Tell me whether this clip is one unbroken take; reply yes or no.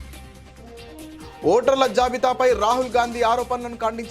yes